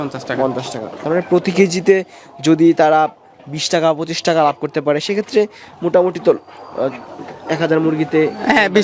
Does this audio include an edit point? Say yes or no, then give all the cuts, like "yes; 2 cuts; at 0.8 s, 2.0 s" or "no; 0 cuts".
no; 0 cuts